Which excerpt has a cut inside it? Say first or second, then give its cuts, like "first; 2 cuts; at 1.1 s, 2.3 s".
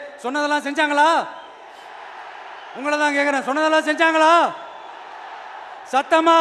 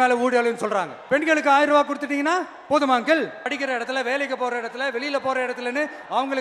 second; 2 cuts; at 1.0 s, 3.5 s